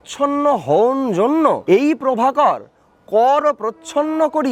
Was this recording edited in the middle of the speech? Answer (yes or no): yes